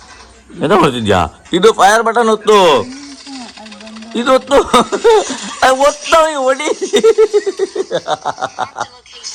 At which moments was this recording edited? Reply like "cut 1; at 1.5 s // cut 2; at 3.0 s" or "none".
none